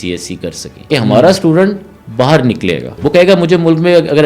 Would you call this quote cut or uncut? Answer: cut